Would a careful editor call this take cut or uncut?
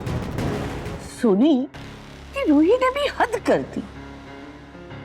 cut